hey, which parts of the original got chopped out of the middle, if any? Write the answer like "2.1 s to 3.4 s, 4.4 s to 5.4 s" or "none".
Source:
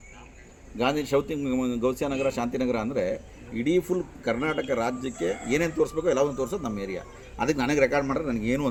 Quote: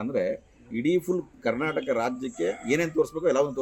none